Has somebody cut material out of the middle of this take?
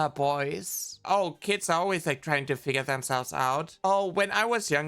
yes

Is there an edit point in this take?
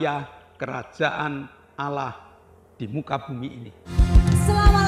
yes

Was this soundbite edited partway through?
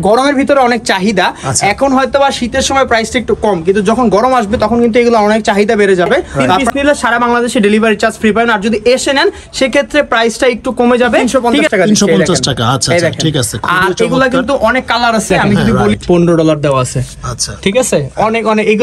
yes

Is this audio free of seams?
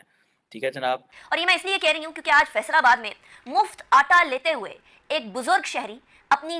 no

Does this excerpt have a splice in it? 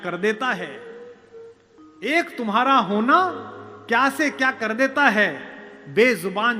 no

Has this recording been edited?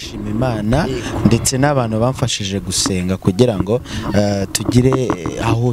no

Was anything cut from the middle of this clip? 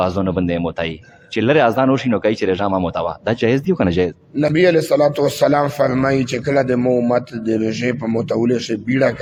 no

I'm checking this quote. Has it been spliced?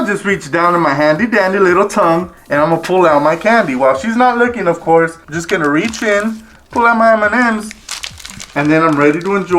yes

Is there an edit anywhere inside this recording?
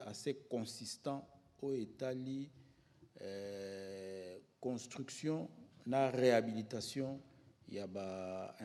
no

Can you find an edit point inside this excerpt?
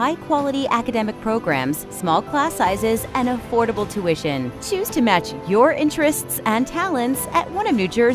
no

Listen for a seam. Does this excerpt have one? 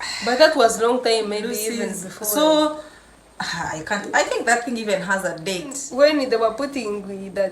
yes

